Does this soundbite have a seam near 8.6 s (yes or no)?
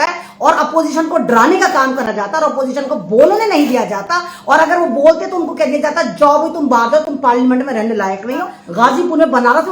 yes